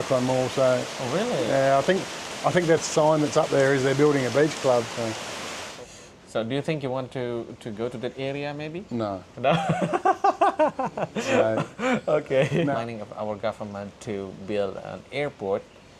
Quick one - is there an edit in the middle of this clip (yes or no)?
yes